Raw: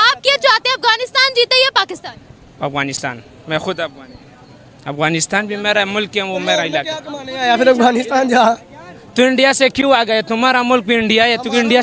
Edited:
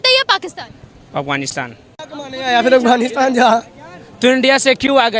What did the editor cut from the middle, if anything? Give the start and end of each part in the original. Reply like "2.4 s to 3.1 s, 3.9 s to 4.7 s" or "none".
3.4 s to 6.9 s